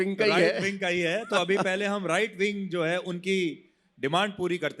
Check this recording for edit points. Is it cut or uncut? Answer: uncut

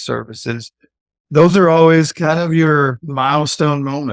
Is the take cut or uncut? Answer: cut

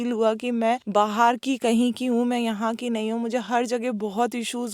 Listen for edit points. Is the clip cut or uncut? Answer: uncut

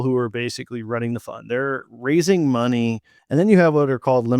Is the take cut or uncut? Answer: cut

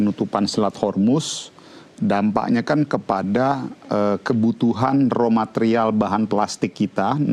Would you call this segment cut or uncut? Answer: uncut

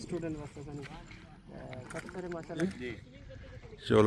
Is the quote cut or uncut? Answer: cut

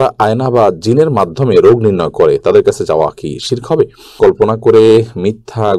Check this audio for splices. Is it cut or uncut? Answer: cut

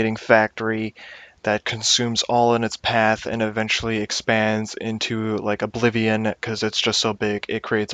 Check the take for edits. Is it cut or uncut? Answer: uncut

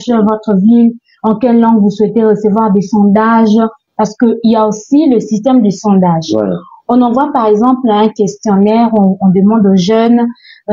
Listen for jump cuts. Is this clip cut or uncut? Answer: uncut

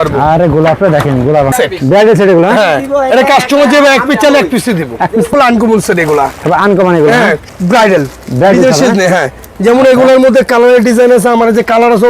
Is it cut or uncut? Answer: cut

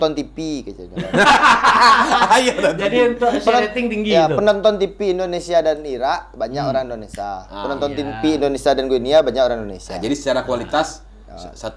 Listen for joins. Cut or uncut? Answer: uncut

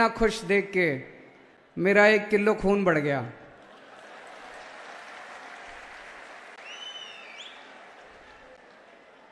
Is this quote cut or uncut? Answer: uncut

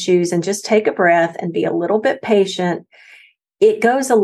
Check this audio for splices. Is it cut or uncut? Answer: uncut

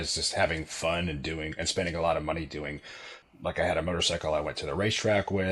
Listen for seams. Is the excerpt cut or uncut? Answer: cut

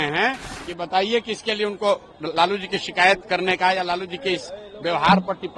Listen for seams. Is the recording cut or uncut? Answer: uncut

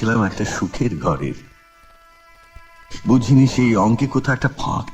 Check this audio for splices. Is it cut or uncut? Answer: uncut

